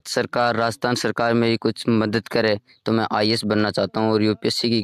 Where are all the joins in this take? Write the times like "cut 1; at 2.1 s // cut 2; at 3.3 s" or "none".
none